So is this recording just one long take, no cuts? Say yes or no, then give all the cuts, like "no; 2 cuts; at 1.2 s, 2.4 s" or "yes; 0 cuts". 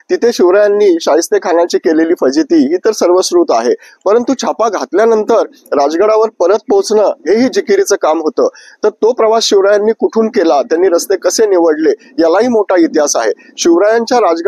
yes; 0 cuts